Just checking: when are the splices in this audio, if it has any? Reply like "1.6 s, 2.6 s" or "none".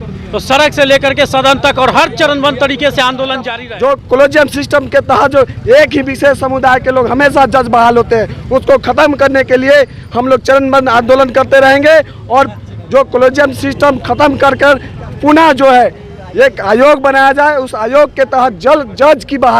3.5 s